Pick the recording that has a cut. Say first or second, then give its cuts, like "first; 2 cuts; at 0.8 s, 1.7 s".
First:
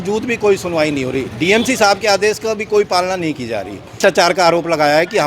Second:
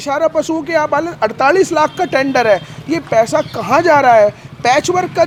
first; 1 cut; at 4.0 s